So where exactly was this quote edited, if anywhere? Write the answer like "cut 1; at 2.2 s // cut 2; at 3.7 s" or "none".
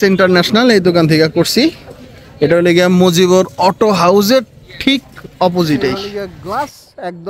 cut 1; at 6.0 s